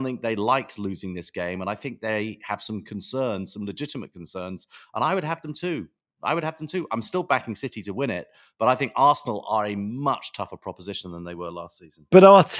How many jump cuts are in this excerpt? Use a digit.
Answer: 0